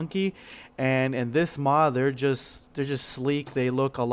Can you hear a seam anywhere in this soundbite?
yes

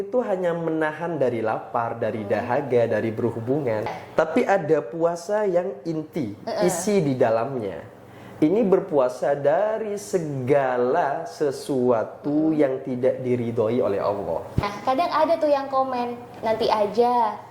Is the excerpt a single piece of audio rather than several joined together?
no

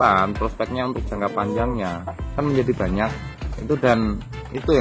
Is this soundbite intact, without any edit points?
no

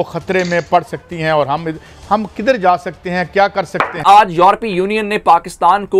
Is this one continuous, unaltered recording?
no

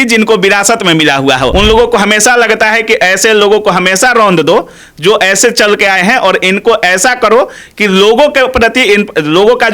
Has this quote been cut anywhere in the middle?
yes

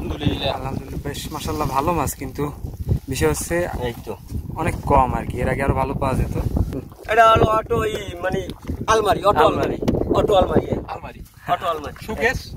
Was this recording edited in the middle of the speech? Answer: yes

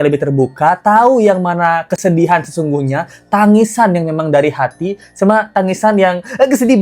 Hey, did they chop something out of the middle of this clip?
no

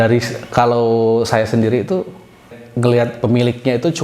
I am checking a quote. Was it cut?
yes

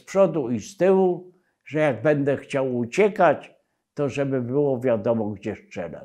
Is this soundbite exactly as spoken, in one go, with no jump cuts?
yes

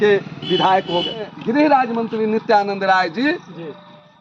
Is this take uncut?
no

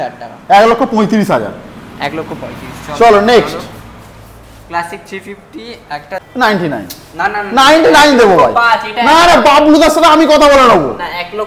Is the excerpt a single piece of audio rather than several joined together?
no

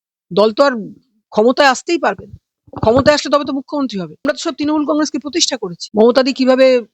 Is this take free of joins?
no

